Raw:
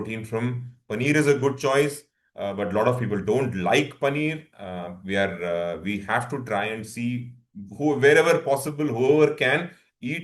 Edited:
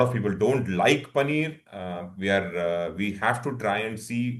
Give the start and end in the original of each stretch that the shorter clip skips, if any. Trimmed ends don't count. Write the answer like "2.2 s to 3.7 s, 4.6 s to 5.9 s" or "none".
none